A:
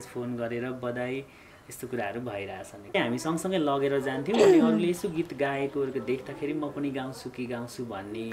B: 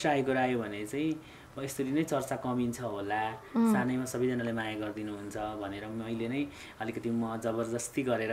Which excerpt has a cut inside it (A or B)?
A